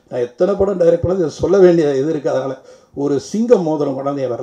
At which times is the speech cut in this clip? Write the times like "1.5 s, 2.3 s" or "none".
none